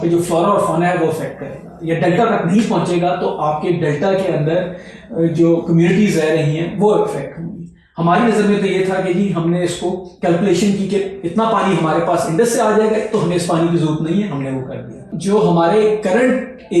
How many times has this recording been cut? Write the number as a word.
one